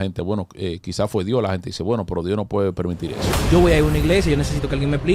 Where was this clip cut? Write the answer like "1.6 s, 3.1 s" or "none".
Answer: 3.3 s